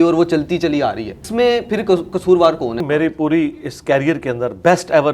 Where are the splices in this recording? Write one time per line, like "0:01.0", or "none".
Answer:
0:01.2
0:02.8